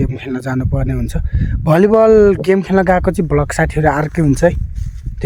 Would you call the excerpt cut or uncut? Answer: uncut